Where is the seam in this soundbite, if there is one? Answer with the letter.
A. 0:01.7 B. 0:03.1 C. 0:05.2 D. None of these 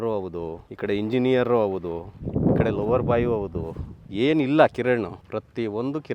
C